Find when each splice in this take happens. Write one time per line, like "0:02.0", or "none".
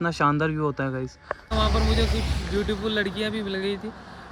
0:01.5

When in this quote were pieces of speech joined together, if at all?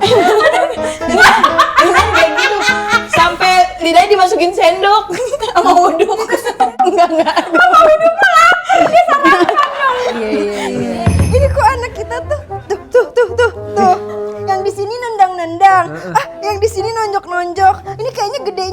0:11.2

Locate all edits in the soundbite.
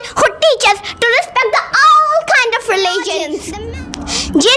0:03.4

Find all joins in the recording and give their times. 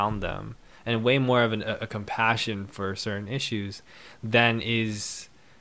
none

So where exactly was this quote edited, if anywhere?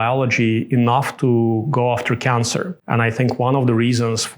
0:02.8

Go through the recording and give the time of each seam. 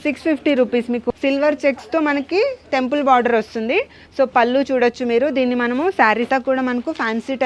0:01.1
0:06.3

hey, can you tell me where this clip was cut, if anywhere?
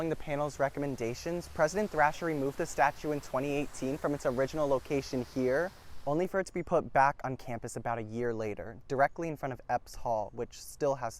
none

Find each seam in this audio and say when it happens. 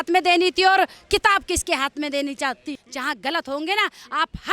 0:02.8

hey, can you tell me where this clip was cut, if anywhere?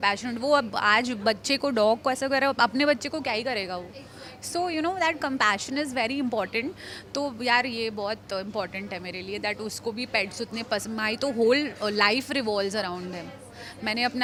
none

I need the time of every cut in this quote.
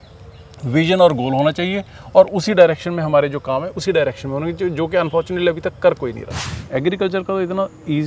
0:06.5

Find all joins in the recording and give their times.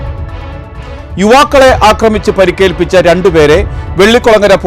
0:00.9

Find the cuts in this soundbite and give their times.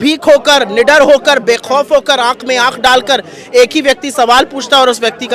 none

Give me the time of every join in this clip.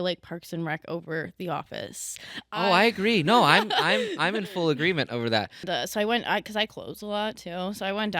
0:05.6

